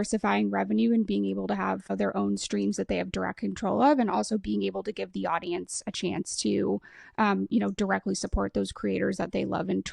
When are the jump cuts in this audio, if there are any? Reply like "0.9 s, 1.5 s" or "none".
1.9 s